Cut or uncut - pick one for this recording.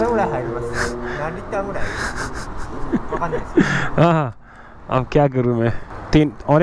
uncut